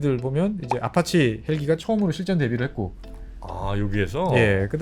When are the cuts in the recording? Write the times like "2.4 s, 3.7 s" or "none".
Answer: none